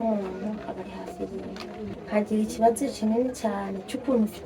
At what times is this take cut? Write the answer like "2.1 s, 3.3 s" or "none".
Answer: 1.9 s